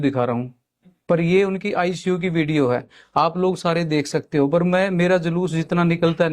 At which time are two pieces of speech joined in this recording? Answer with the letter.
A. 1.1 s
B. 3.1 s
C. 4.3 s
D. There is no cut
D